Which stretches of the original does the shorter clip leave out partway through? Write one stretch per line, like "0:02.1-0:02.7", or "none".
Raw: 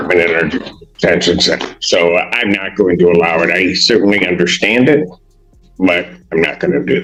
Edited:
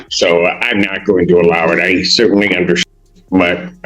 0:04.6-0:05.3